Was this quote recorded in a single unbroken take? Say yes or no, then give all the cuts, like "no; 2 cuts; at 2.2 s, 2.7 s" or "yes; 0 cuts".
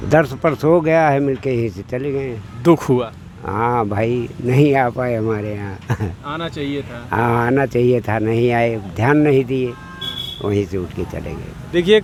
yes; 0 cuts